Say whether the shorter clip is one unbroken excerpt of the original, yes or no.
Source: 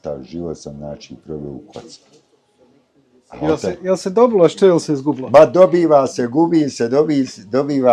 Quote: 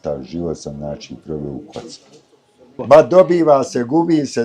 no